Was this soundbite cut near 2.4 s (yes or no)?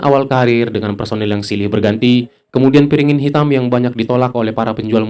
no